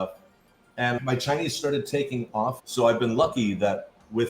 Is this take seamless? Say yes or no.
no